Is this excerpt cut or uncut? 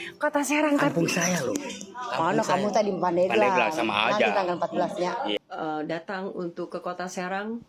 cut